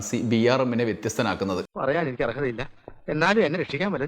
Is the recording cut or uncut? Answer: cut